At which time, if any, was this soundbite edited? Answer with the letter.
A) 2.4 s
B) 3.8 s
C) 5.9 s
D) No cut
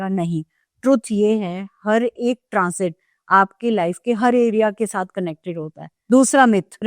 C